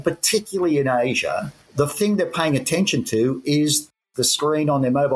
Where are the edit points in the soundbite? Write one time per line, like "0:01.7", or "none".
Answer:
0:01.6
0:03.9

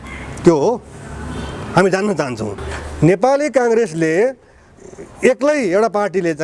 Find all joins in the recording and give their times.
0:02.6

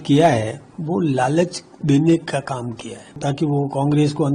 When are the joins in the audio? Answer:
0:03.2

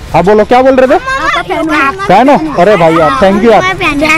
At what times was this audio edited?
none

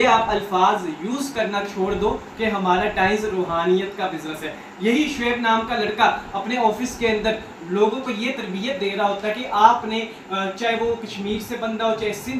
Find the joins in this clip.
none

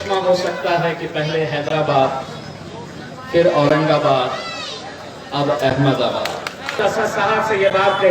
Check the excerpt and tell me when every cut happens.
0:06.8

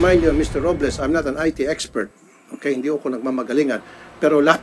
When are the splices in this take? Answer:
none

